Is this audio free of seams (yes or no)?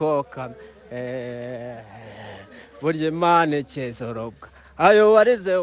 yes